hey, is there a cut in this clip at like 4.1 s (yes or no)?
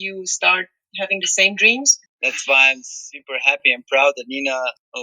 no